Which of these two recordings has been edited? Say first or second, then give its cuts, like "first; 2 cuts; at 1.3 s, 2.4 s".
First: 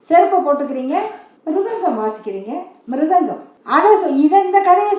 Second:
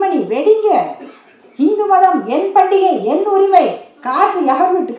first; 3 cuts; at 1.3 s, 2.7 s, 3.5 s